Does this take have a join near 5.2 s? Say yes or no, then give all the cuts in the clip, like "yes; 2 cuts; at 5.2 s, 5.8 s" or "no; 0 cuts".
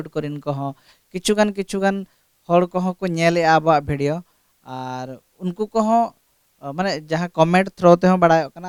no; 0 cuts